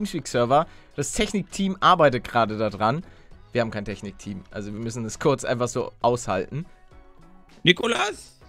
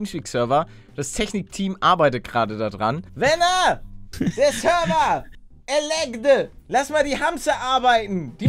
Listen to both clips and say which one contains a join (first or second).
second